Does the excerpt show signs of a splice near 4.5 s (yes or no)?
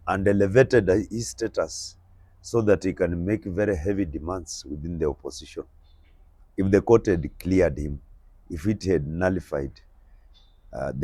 no